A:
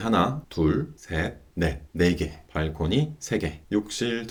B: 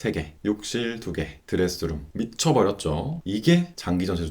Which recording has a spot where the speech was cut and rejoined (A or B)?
B